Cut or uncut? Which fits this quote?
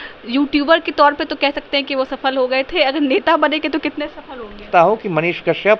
cut